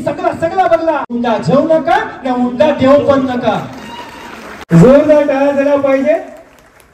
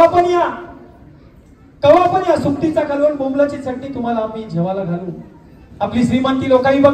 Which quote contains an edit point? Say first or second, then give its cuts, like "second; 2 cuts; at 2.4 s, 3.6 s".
first; 2 cuts; at 1.1 s, 4.5 s